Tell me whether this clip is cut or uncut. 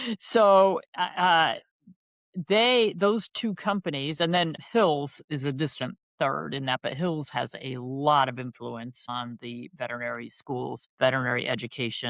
cut